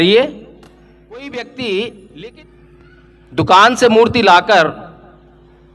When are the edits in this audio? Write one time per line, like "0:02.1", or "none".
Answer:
0:01.3